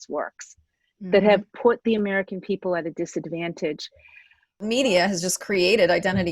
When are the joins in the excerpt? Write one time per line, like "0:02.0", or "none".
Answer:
0:04.6